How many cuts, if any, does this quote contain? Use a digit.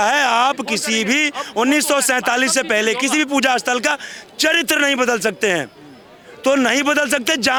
0